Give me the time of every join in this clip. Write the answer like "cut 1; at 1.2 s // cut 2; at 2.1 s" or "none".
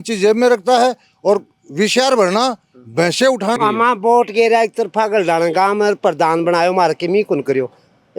cut 1; at 3.6 s